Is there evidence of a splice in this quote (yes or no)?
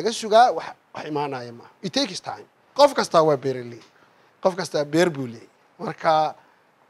yes